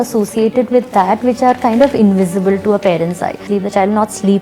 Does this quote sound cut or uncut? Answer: cut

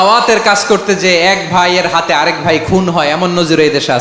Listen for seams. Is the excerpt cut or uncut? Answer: uncut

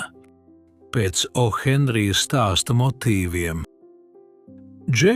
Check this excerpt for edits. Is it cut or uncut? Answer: uncut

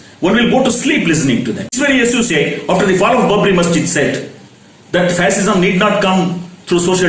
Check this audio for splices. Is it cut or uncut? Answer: cut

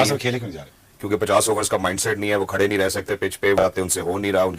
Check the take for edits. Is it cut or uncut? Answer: cut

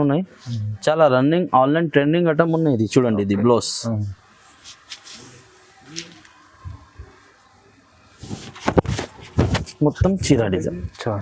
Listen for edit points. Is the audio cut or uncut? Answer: uncut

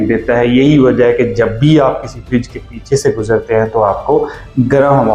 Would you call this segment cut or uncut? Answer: uncut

